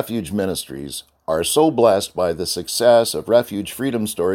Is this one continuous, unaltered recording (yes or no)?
yes